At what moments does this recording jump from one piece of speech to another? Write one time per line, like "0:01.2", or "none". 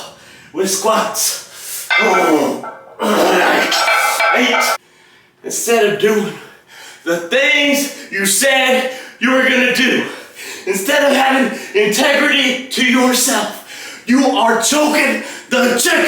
0:04.8